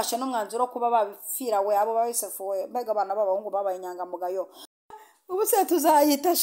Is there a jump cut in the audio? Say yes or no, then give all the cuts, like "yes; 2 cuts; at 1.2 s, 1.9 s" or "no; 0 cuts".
yes; 1 cut; at 4.9 s